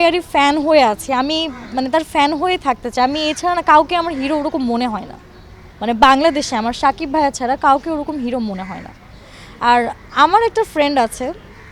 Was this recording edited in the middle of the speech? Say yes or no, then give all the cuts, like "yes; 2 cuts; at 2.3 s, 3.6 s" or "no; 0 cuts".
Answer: no; 0 cuts